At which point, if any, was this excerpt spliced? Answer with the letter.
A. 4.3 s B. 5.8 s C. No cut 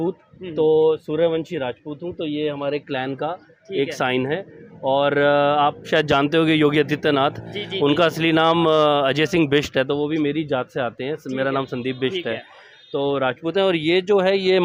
C